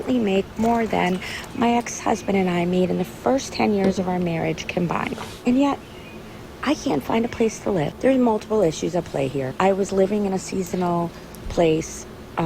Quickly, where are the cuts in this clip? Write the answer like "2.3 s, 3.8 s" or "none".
1.0 s

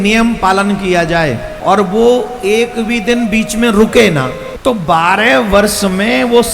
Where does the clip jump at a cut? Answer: 1.5 s, 4.4 s

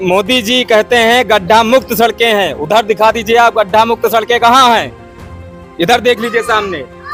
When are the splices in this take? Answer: none

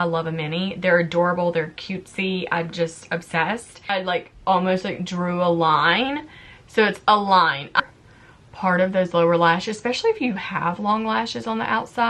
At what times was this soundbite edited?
3.9 s, 7.8 s

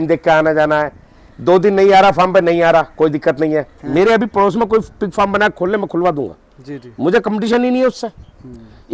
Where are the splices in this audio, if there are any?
3.8 s

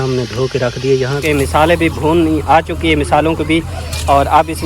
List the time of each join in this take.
1.2 s

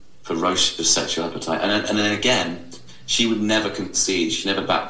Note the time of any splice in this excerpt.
none

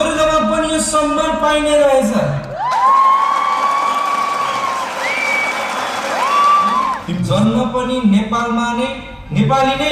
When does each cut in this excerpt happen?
7.1 s

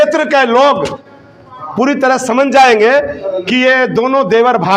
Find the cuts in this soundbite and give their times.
none

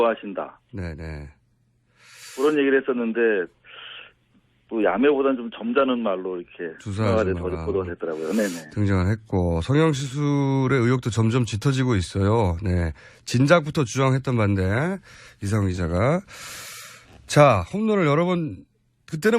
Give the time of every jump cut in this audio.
12.9 s

